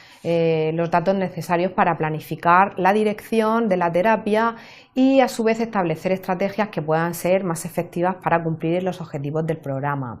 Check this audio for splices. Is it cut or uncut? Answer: cut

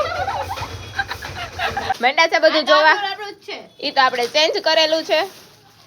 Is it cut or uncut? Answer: cut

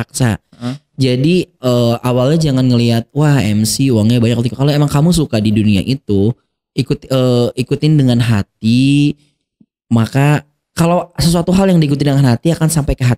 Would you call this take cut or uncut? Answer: uncut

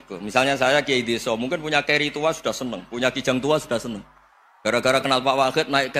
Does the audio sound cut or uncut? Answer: uncut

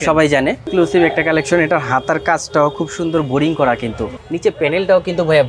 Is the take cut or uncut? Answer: cut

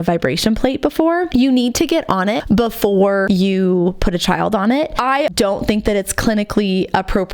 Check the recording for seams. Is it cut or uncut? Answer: cut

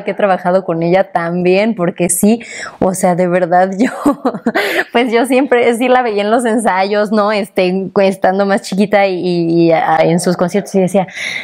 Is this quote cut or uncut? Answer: uncut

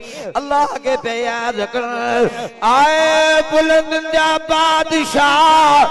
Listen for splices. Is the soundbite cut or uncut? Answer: cut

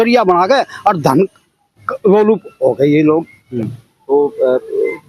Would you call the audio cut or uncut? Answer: cut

